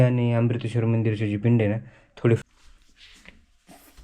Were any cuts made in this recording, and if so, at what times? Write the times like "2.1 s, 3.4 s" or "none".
2.4 s